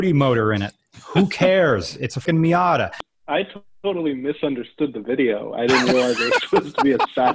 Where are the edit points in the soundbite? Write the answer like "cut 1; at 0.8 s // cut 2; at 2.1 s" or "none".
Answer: cut 1; at 2.2 s // cut 2; at 3.0 s